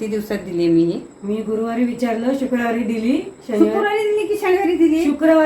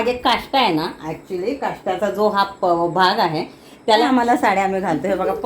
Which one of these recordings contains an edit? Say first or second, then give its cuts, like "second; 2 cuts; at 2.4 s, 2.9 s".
second; 1 cut; at 4.0 s